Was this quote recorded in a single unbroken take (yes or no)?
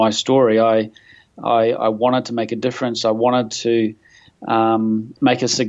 yes